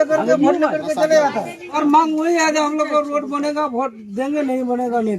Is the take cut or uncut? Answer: cut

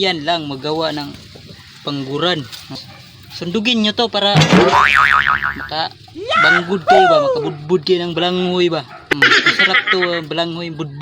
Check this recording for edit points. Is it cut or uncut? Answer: cut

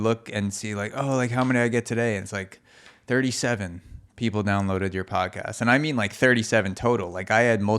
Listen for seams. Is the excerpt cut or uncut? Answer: uncut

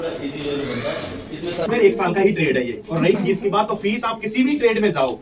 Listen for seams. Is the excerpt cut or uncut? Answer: cut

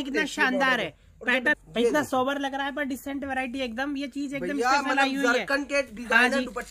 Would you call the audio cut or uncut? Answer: cut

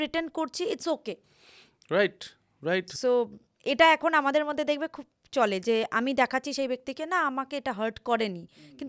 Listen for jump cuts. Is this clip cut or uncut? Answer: uncut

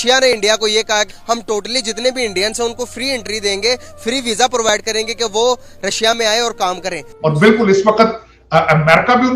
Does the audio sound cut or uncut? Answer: cut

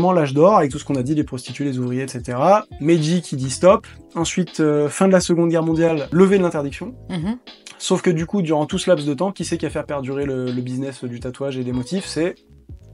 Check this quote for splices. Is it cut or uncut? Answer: cut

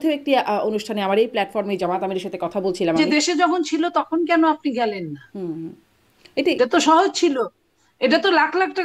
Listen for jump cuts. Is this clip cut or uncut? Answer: cut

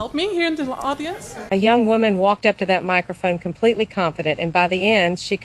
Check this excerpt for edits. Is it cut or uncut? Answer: cut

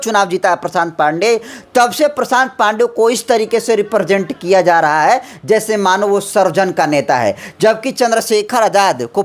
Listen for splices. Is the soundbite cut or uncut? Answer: uncut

